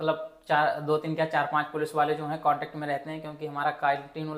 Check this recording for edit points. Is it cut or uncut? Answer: uncut